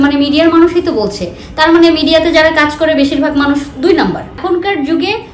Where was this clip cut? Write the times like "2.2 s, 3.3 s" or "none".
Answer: 4.4 s